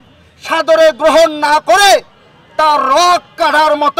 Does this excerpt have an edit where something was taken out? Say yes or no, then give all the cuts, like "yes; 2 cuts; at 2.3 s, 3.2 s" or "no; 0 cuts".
no; 0 cuts